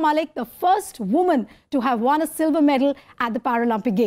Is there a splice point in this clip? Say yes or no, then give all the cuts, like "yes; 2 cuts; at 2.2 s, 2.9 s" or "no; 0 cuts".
no; 0 cuts